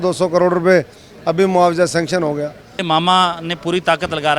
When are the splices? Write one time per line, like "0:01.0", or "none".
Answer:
0:02.7